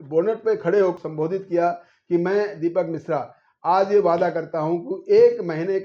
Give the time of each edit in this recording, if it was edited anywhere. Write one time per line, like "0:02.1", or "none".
0:00.9

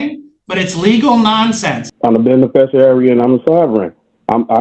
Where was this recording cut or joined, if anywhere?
0:01.9

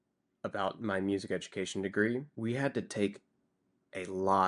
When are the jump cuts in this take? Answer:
0:02.3

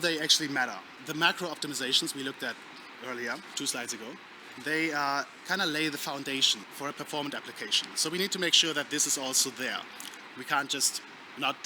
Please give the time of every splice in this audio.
0:01.0
0:03.5
0:06.6

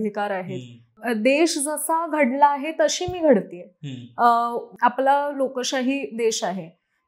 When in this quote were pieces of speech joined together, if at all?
0:00.9
0:04.7

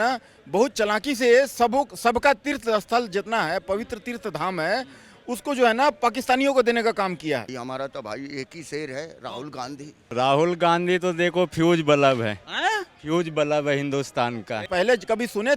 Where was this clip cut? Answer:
0:07.5
0:10.1
0:14.6

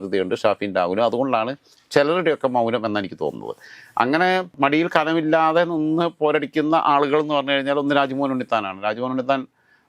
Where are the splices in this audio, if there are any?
none

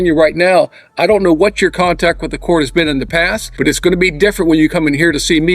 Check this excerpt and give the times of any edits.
0:03.4

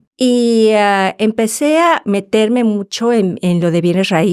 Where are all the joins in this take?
none

